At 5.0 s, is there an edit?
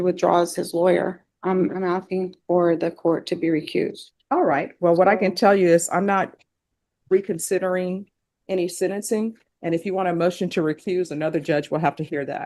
no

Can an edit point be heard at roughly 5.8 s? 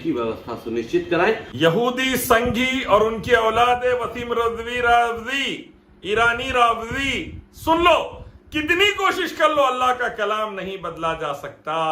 no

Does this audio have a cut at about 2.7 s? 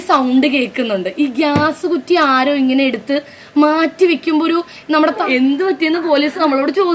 no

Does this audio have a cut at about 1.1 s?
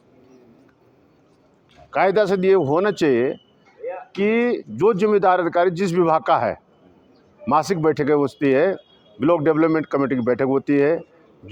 no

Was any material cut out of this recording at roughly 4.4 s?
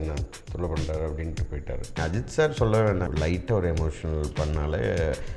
no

